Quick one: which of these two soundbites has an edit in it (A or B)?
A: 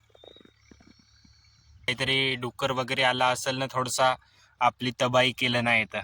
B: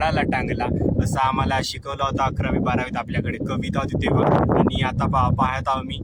A